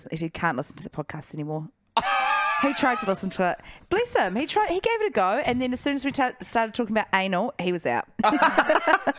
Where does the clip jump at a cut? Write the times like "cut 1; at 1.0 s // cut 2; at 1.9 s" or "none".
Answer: none